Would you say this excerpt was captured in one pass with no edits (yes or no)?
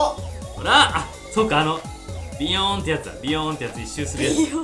yes